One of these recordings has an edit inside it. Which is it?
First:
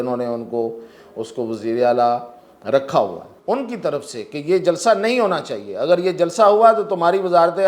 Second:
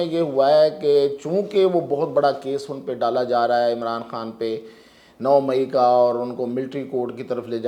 first; 1 cut; at 3.3 s

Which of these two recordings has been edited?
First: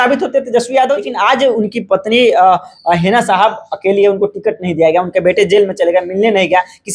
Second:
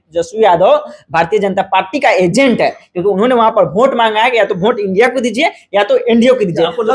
first; 1 cut; at 1.1 s

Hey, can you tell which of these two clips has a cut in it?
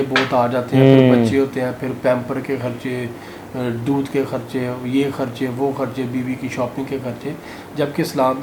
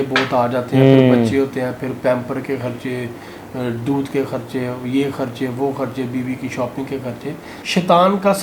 second; 1 cut; at 7.5 s

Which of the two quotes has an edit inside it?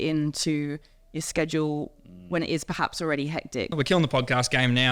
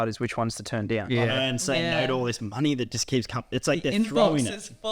first; 1 cut; at 3.7 s

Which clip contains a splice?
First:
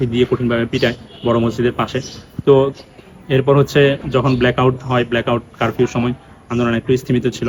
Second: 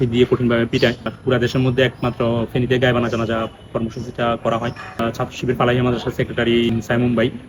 second; 3 cuts; at 1.1 s, 5.0 s, 6.7 s

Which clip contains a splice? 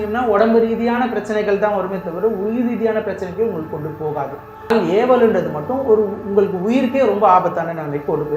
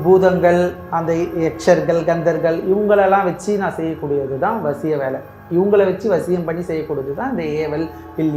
first; 1 cut; at 4.7 s

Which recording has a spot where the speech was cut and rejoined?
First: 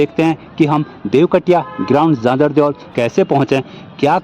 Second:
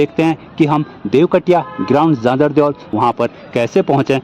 first; 1 cut; at 2.8 s

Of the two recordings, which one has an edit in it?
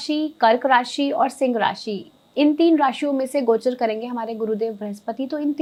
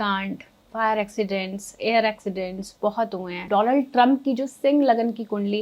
second; 1 cut; at 3.4 s

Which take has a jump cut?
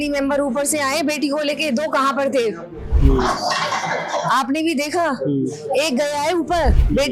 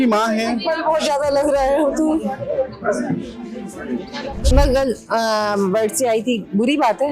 second; 1 cut; at 4.5 s

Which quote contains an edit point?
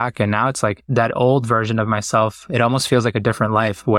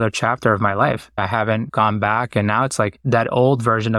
second; 1 cut; at 1.2 s

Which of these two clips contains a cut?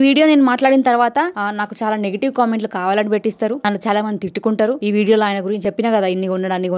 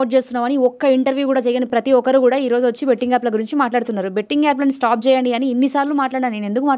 first; 4 cuts; at 1.4 s, 3.6 s, 4.8 s, 5.6 s

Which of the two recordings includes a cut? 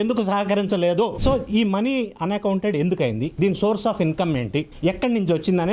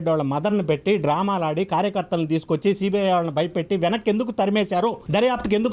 first; 2 cuts; at 1.2 s, 3.3 s

